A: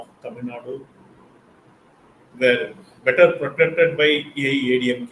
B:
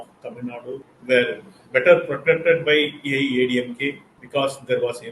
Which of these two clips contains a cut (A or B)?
B